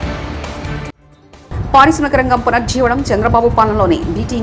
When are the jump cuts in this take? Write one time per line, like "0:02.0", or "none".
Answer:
none